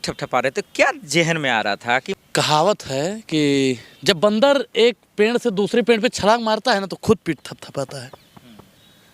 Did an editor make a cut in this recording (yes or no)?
yes